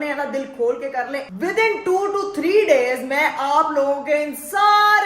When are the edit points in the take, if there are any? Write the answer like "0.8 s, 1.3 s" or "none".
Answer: 1.3 s